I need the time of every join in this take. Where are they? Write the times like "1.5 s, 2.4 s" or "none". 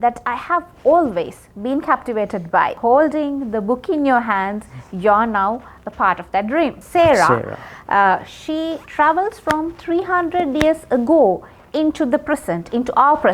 2.8 s, 6.8 s